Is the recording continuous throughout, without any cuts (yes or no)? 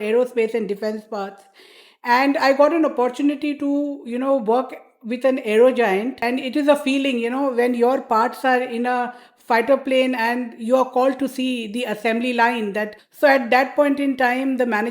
no